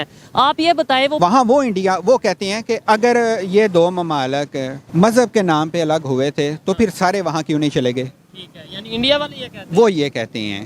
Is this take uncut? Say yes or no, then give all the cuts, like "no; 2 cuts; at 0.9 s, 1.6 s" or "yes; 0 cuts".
no; 3 cuts; at 1.2 s, 2.8 s, 4.8 s